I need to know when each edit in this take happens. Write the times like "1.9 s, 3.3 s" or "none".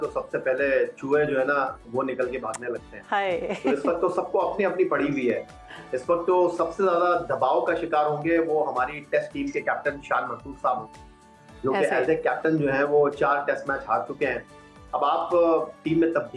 none